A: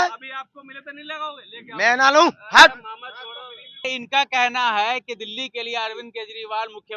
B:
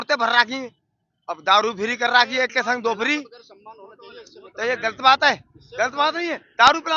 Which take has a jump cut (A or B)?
A